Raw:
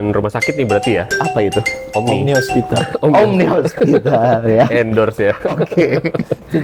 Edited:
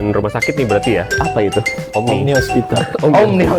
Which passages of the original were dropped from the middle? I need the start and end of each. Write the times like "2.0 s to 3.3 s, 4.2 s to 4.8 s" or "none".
none